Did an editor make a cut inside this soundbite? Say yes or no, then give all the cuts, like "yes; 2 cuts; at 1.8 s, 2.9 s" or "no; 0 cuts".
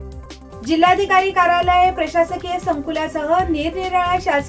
no; 0 cuts